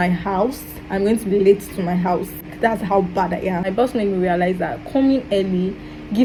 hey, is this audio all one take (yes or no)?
yes